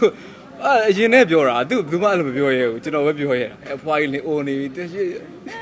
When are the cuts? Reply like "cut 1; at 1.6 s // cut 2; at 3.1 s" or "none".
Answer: none